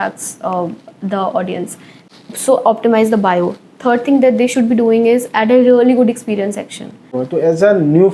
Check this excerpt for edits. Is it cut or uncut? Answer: cut